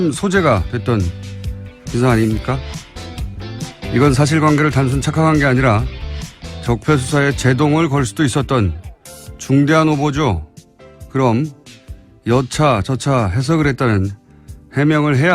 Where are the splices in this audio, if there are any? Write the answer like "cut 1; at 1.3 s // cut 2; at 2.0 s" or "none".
cut 1; at 8.6 s

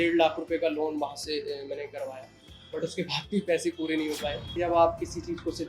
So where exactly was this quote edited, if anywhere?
cut 1; at 4.5 s

